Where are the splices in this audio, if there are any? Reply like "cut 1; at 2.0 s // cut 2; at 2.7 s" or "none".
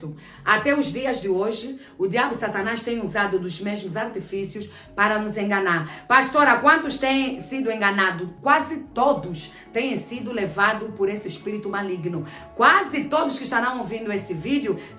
none